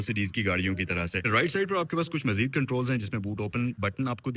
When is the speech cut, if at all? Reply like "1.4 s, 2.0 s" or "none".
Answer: none